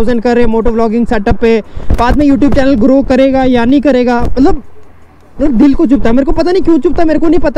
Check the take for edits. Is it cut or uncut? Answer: uncut